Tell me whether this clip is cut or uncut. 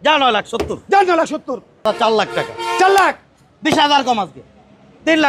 cut